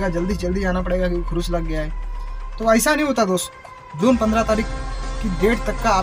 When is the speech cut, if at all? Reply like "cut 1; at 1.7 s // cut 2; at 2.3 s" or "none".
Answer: cut 1; at 3.6 s